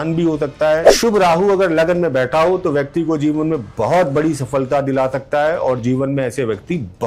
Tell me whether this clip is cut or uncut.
cut